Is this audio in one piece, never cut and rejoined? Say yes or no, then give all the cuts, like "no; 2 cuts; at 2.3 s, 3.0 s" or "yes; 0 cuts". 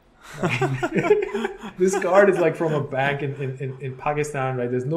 no; 1 cut; at 1.6 s